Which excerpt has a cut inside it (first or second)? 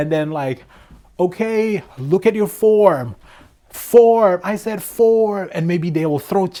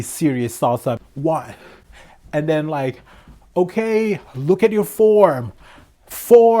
second